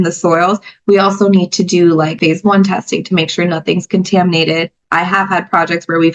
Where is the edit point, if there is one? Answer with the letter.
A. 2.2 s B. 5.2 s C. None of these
A